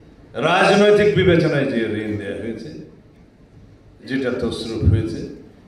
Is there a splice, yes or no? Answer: no